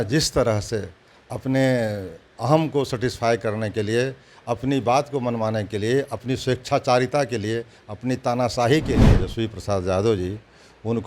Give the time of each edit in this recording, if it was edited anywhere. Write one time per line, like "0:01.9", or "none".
0:09.2